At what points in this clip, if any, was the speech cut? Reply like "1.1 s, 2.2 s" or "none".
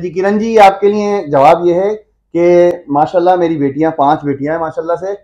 none